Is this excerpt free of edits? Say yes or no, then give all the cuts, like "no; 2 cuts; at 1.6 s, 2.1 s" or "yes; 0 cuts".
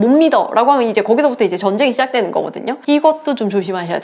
no; 1 cut; at 2.8 s